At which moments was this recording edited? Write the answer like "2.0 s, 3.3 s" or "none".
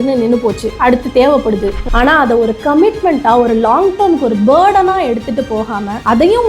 1.8 s